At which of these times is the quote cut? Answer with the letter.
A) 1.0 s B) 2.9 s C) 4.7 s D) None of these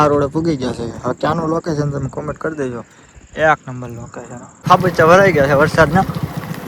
C